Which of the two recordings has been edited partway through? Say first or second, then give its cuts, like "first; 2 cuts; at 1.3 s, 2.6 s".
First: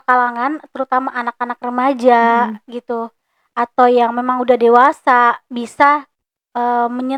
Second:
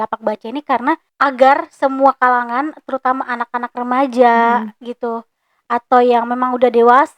second; 1 cut; at 1.1 s